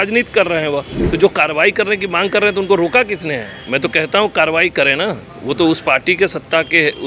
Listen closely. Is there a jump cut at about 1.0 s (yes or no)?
yes